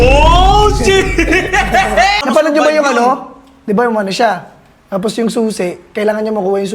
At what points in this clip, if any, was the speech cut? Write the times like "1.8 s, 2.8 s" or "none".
2.2 s